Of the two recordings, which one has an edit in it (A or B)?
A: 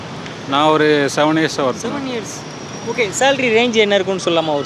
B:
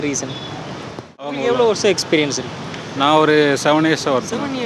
B